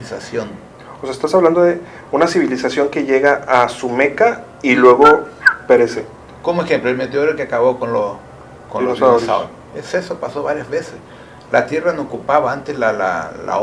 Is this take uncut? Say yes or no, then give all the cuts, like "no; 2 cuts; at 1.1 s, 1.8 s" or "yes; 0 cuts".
yes; 0 cuts